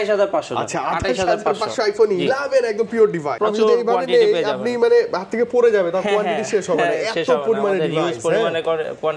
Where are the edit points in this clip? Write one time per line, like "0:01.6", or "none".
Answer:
0:03.3